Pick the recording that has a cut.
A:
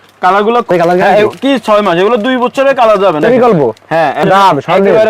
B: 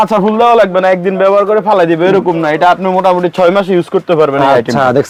A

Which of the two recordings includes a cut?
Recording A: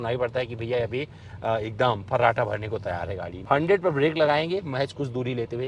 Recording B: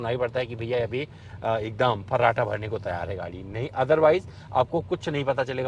A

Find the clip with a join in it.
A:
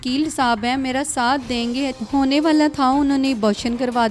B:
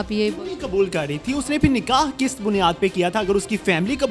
A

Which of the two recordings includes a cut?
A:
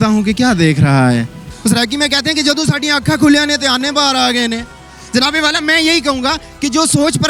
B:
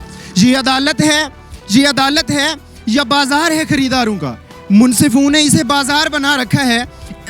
A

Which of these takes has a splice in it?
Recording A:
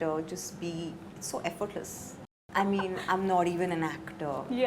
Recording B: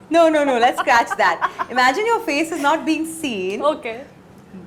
A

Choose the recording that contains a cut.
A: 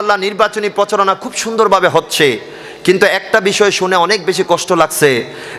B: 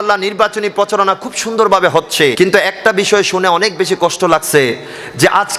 B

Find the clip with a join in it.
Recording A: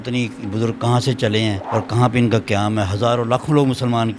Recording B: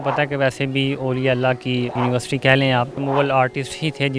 B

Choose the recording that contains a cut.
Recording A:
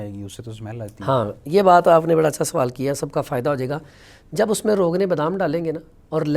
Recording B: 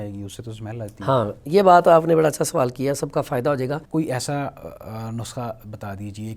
B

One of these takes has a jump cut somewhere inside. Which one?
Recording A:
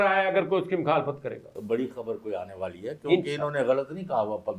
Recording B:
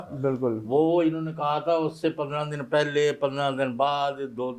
A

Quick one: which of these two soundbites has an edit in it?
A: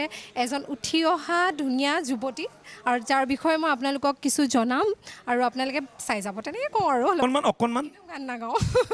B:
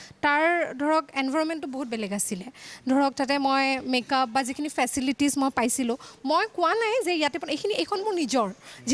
A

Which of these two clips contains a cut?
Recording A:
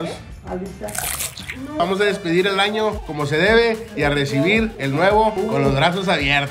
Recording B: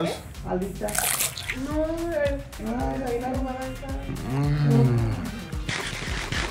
A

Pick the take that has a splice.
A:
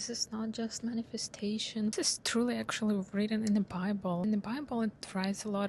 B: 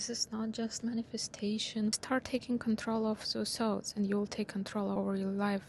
B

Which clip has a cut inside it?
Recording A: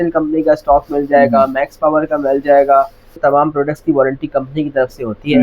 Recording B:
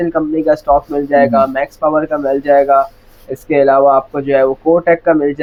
A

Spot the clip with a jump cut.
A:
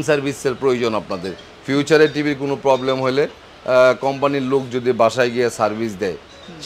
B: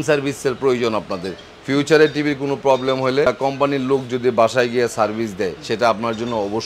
B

